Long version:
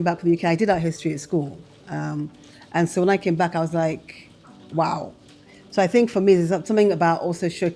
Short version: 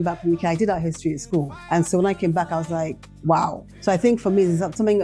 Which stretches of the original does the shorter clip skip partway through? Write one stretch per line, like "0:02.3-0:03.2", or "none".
0:01.6-0:02.6
0:04.1-0:04.5
0:05.2-0:05.6